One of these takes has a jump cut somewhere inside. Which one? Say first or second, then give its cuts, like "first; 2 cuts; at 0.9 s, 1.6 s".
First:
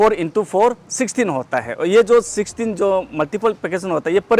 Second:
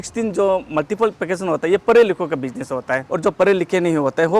second; 1 cut; at 3.0 s